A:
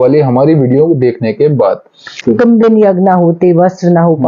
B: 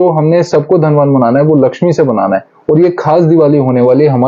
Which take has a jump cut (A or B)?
A